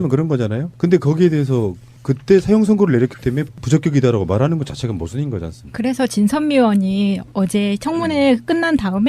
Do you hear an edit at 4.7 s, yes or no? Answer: yes